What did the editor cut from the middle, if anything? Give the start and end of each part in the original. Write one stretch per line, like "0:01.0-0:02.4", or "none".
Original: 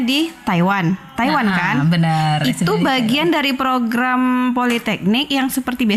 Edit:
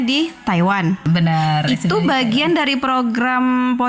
0:01.1-0:01.8